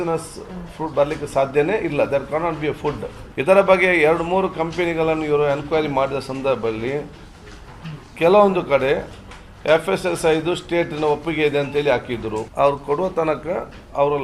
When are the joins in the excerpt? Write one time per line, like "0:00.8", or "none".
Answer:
0:03.1
0:12.4